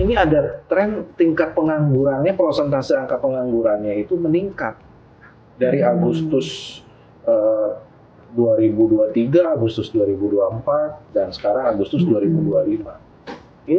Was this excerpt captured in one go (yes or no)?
yes